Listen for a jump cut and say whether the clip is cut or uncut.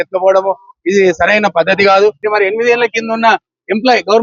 cut